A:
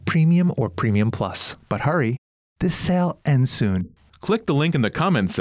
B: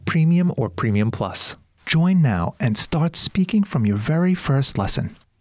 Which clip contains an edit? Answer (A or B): A